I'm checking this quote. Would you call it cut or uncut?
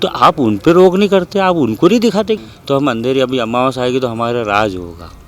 cut